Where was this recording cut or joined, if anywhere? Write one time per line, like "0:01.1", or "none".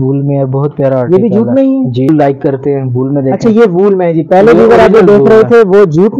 0:02.1